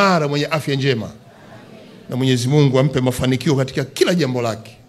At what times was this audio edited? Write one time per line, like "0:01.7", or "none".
none